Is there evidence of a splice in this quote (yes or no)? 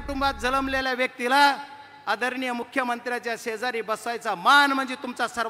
no